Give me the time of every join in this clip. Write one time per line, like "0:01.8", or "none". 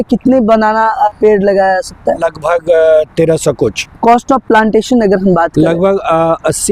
0:01.1
0:02.2
0:03.9